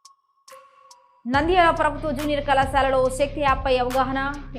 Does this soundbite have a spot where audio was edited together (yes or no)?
yes